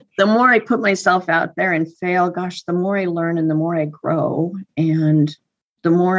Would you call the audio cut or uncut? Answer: uncut